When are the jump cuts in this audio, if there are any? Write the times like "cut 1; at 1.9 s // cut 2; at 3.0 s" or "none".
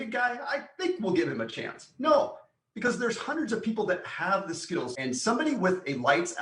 cut 1; at 4.9 s